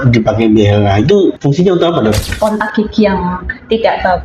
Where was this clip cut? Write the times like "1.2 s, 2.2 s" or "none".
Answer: 1.4 s, 2.3 s